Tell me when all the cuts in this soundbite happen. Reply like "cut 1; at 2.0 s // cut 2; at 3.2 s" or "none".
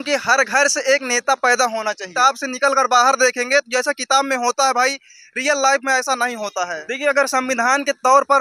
cut 1; at 2.1 s // cut 2; at 6.8 s